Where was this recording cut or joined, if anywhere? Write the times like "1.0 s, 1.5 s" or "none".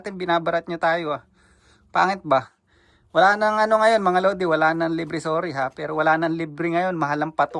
none